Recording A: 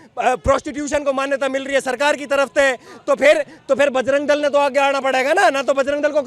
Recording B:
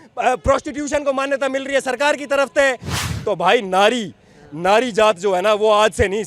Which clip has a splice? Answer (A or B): B